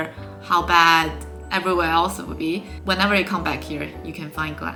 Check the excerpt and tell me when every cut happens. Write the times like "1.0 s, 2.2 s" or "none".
none